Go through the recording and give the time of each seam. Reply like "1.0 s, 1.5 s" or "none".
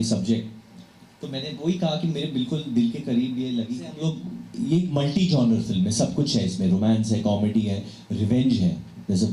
3.9 s